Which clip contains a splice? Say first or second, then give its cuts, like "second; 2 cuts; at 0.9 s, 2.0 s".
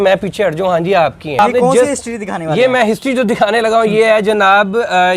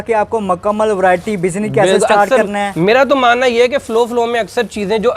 first; 1 cut; at 1.4 s